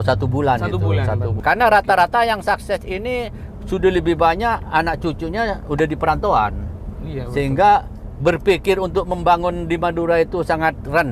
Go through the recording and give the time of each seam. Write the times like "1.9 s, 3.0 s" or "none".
1.4 s